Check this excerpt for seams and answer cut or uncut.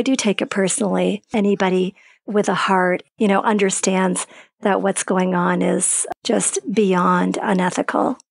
cut